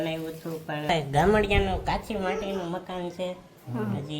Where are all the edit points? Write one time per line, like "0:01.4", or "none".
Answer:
0:00.9